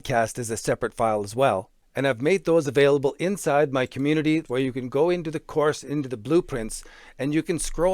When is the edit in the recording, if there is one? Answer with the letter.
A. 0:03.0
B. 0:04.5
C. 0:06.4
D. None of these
B